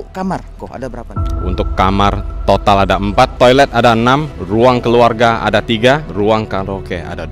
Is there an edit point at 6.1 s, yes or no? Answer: yes